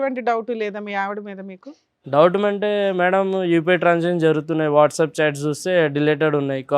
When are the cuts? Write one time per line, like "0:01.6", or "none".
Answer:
none